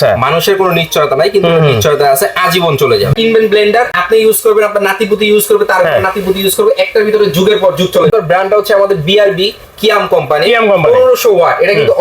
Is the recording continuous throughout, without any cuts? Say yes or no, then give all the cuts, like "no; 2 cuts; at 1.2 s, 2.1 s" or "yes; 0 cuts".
no; 3 cuts; at 3.1 s, 4.0 s, 8.1 s